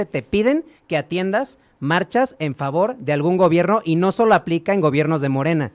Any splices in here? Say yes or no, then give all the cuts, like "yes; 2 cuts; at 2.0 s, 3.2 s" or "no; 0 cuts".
no; 0 cuts